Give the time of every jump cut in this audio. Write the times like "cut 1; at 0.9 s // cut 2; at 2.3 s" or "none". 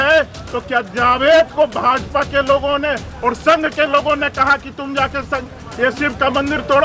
none